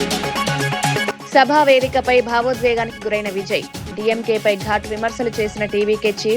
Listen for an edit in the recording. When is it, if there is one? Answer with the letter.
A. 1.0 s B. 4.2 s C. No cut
A